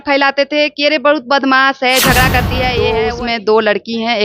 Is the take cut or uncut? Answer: cut